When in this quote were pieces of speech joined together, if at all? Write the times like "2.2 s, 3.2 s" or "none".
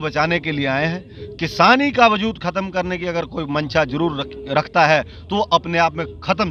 none